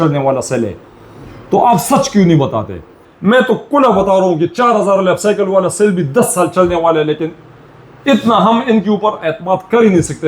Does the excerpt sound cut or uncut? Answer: cut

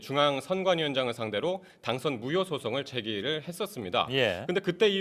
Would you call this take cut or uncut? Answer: cut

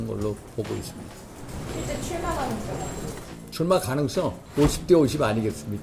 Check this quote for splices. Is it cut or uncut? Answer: cut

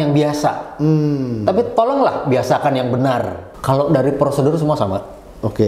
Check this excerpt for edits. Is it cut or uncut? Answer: cut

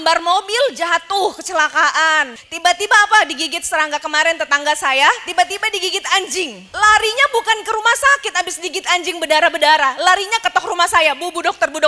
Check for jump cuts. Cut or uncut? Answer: cut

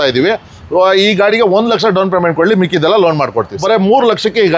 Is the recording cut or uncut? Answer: cut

